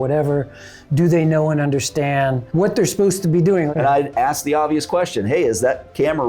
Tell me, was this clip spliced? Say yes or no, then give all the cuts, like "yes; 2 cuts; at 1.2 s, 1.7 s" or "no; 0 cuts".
yes; 2 cuts; at 2.4 s, 3.7 s